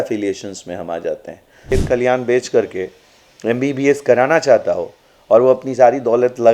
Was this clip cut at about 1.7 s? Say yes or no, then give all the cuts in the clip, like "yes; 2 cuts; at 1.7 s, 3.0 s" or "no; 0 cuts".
yes; 1 cut; at 1.7 s